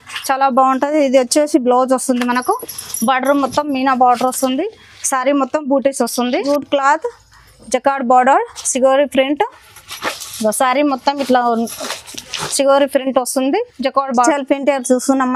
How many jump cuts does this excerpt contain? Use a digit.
2